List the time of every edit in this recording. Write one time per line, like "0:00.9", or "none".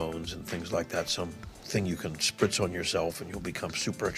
none